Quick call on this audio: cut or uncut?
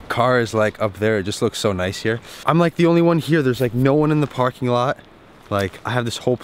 cut